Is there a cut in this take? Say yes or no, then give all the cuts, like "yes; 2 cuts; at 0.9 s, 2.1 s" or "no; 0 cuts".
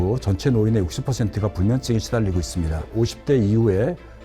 yes; 1 cut; at 2.9 s